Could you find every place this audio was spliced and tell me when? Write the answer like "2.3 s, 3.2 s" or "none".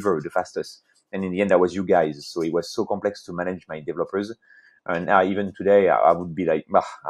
none